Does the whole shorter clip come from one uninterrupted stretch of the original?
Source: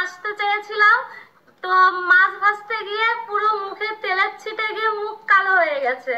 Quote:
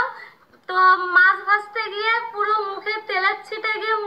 yes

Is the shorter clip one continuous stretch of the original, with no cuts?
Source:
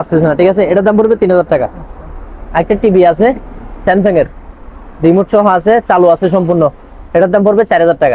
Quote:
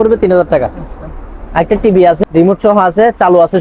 no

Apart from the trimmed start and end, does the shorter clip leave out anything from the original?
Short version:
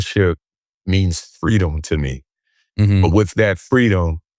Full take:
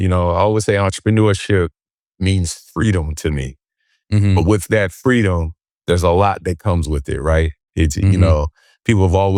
no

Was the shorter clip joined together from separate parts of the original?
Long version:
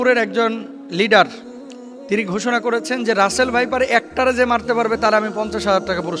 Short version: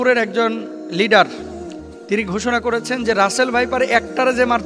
no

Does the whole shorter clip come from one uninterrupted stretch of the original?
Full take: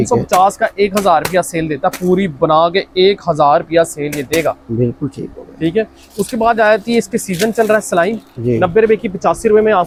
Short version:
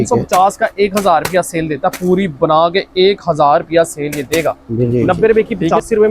no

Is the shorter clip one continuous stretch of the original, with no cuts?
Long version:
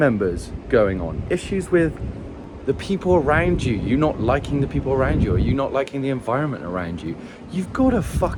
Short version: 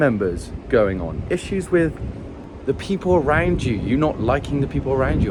yes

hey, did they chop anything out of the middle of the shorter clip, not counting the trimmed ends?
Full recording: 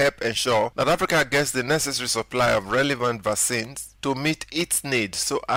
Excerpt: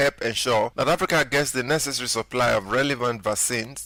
no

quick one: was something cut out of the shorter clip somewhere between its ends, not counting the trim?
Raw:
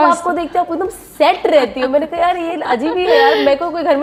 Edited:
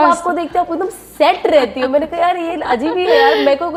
no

